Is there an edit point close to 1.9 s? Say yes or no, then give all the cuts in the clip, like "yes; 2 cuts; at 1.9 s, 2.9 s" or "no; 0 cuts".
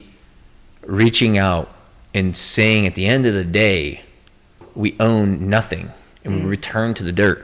no; 1 cut; at 4.7 s